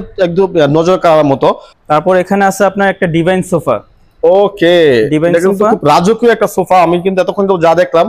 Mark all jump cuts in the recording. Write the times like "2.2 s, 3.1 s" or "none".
1.7 s